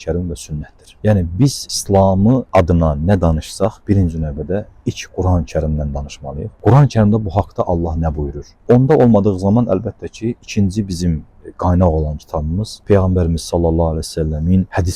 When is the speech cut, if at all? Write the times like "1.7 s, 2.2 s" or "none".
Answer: none

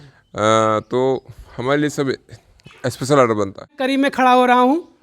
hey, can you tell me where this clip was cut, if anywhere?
3.7 s

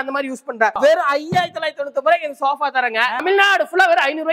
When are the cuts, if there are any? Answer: 0.8 s, 3.2 s

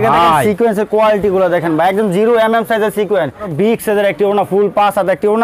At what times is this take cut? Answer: 3.5 s

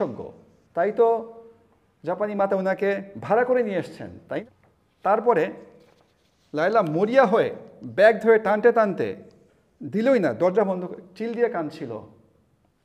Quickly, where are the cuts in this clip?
4.4 s

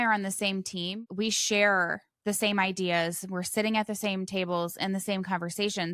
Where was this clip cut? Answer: 0.9 s

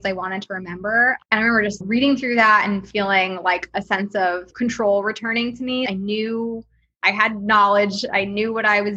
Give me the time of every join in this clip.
1.8 s, 4.5 s, 5.9 s

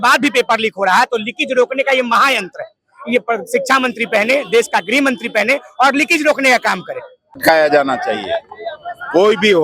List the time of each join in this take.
7.3 s

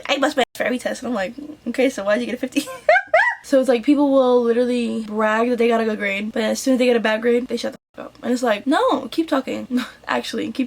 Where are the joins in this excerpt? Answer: 3.4 s

